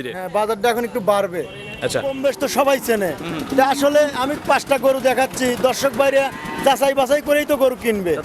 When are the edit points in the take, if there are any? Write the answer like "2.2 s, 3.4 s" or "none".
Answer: 2.1 s